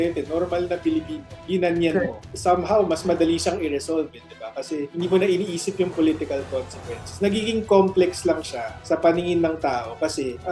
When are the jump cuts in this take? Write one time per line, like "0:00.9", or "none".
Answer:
0:02.2
0:04.9